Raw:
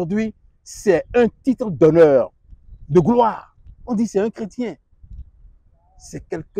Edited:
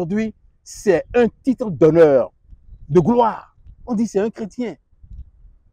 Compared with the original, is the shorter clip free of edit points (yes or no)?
yes